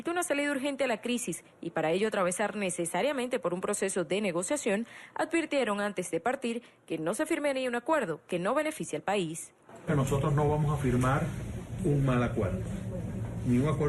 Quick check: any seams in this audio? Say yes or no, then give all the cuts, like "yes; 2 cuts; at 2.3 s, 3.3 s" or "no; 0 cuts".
no; 0 cuts